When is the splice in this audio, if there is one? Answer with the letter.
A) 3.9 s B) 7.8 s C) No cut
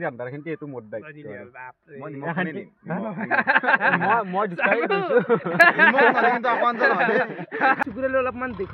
B